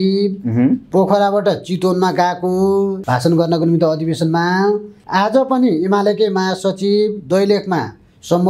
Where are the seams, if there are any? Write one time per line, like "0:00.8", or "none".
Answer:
0:03.0
0:04.9